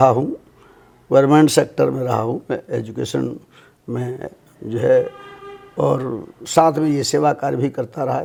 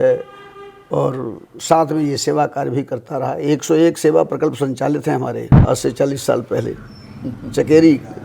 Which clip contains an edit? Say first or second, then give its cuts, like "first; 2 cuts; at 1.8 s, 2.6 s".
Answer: second; 1 cut; at 5.5 s